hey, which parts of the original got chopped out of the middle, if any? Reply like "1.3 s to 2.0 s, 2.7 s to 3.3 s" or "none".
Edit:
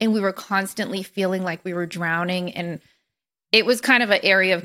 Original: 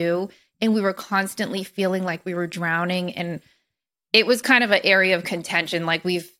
none